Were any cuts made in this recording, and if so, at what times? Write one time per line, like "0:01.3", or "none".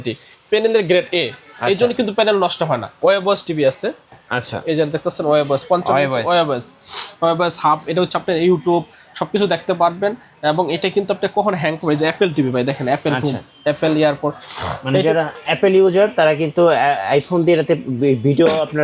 0:03.0

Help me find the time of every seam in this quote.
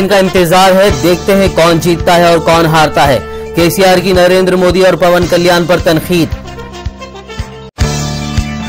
none

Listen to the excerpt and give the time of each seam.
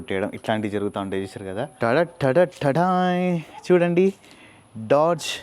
0:01.7

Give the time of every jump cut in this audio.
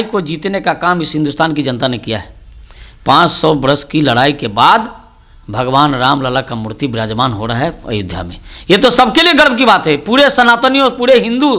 none

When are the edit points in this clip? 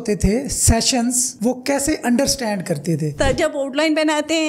0:03.1

